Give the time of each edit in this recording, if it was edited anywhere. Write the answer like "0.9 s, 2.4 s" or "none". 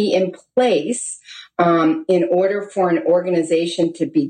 none